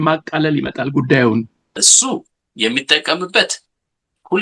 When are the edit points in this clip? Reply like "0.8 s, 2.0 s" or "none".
1.7 s